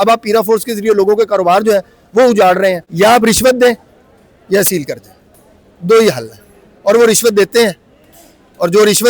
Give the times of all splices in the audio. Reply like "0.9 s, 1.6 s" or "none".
2.9 s